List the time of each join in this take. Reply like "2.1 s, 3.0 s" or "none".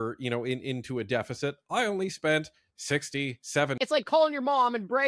3.8 s